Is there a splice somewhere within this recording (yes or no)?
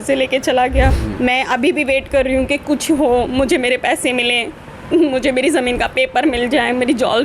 yes